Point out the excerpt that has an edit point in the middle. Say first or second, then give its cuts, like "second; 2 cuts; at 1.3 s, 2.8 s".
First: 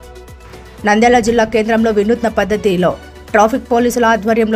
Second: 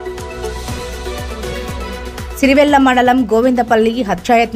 second; 1 cut; at 2.2 s